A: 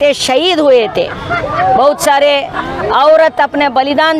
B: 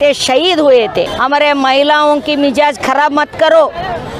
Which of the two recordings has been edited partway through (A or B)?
B